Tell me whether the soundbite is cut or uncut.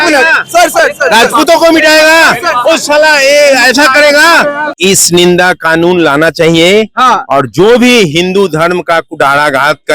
cut